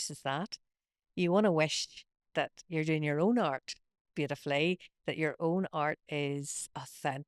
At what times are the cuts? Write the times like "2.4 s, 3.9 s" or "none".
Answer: none